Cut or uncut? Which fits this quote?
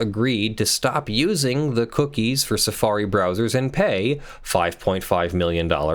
uncut